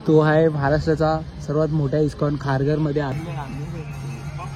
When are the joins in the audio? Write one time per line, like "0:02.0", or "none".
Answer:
0:03.2